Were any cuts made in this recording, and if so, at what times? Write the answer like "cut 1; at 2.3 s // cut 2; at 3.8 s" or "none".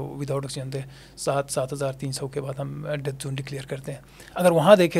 none